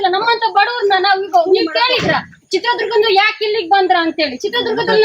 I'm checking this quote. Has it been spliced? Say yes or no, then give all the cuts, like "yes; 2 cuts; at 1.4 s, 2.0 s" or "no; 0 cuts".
no; 0 cuts